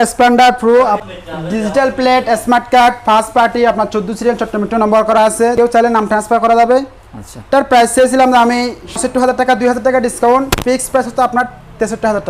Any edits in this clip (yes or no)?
yes